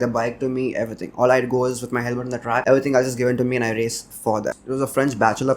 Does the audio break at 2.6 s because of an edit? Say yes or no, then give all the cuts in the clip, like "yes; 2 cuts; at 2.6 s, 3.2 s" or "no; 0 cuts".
yes; 2 cuts; at 2.6 s, 4.6 s